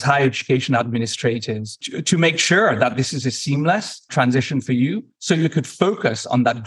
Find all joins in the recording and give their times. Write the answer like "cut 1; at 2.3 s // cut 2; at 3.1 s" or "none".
cut 1; at 4.1 s